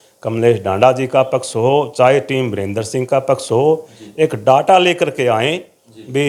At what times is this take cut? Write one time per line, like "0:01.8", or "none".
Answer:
none